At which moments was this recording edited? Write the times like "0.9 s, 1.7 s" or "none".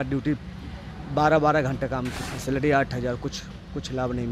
2.2 s